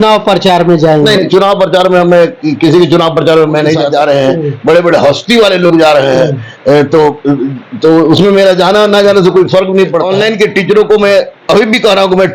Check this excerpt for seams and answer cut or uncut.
cut